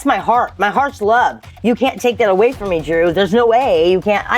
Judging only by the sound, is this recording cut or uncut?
uncut